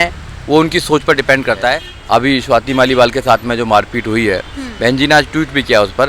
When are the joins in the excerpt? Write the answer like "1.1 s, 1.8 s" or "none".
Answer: 1.9 s